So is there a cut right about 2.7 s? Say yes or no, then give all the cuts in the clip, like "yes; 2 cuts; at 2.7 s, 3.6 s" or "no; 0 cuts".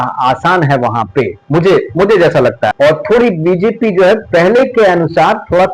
yes; 1 cut; at 2.7 s